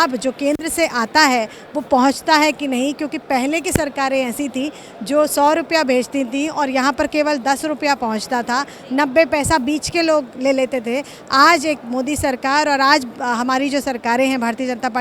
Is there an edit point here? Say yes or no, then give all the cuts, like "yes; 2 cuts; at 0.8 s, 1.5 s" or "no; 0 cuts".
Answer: no; 0 cuts